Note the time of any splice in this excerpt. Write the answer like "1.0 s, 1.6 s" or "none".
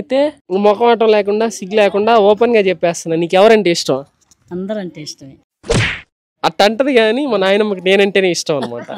none